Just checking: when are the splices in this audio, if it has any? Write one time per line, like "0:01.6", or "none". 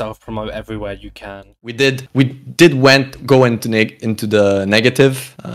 0:01.7